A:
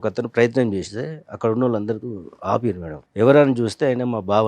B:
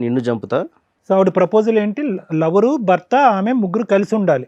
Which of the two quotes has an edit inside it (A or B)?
A